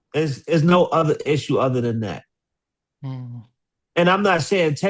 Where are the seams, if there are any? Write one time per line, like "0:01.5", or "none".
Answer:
none